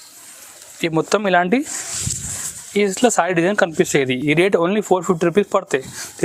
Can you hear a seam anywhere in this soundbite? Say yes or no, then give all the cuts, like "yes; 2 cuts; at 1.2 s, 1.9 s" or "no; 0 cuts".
no; 0 cuts